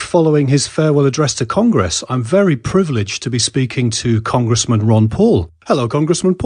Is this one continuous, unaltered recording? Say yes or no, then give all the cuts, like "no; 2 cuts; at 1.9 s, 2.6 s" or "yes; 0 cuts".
no; 1 cut; at 4.0 s